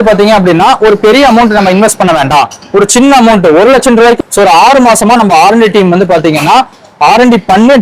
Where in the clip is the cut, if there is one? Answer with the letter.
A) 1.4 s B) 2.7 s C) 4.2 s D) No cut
C